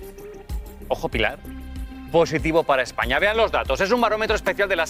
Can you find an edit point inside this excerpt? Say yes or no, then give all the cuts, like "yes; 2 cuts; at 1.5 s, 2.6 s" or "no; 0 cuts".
no; 0 cuts